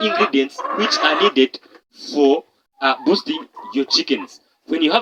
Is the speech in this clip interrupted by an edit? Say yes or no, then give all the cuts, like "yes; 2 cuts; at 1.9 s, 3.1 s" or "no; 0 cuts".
no; 0 cuts